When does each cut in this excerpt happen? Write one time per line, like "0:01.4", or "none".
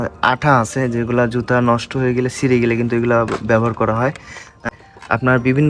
0:04.7